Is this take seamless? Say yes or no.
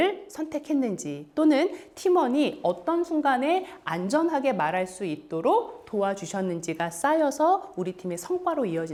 yes